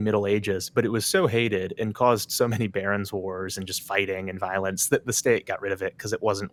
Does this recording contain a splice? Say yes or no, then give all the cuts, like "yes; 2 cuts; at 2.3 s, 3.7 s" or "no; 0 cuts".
no; 0 cuts